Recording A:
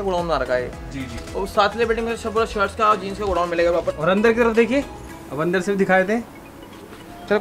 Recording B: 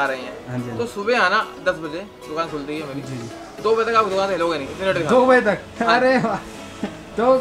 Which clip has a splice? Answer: A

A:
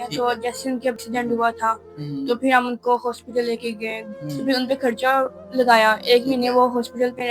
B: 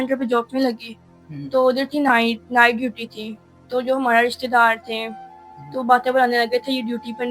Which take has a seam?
A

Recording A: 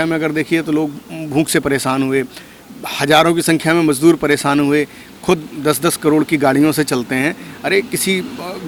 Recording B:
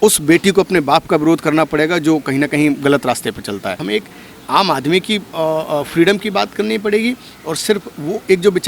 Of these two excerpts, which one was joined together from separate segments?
B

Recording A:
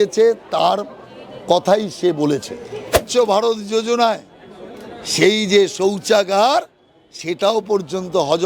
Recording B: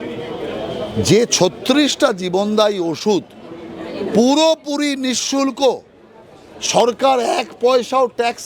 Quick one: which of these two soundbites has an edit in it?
A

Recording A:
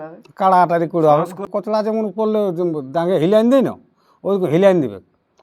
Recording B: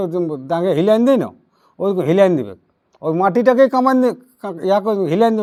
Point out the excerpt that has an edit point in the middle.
A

